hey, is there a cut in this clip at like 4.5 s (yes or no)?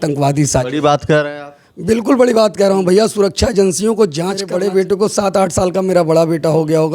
yes